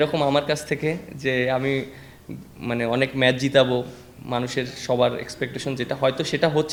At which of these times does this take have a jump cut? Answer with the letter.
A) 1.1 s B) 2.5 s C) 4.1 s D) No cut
D